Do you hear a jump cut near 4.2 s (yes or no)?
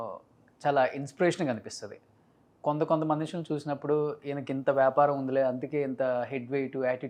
no